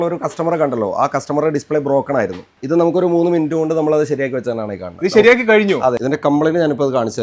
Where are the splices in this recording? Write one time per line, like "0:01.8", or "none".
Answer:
0:02.5
0:06.0